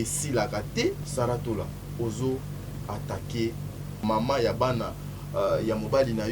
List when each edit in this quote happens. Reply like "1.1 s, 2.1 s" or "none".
1.0 s, 4.0 s